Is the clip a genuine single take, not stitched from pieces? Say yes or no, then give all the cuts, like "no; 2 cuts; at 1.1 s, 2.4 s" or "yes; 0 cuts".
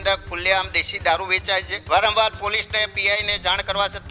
no; 1 cut; at 1.7 s